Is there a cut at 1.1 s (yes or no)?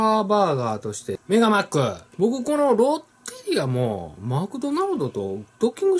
yes